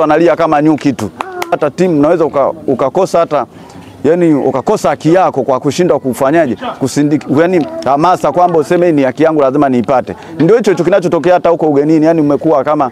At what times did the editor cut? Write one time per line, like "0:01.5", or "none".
0:01.5